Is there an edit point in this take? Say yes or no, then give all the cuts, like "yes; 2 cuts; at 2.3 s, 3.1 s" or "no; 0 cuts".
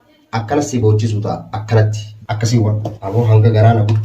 yes; 1 cut; at 2.9 s